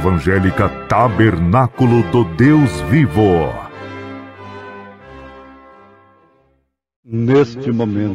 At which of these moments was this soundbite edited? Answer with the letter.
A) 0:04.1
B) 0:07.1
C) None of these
B